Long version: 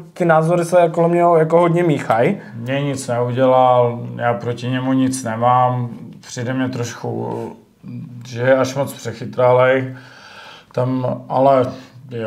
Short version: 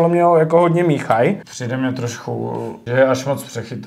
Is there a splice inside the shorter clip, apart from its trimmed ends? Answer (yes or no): yes